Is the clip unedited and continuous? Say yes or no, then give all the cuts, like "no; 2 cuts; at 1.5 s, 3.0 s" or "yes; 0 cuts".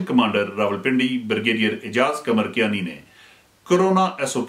yes; 0 cuts